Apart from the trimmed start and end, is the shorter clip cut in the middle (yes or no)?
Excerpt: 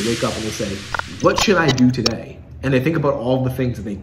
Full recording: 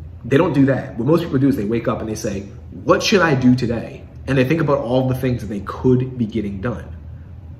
no